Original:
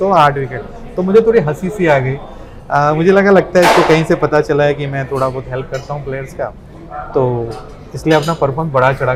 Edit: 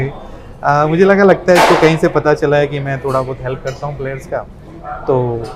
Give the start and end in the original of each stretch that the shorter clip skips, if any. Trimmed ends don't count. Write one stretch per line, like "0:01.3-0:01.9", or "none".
none